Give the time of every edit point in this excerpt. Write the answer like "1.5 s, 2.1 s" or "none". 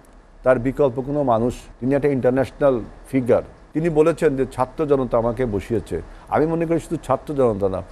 1.7 s, 3.6 s